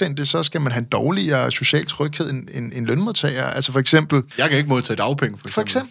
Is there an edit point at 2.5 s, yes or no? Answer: no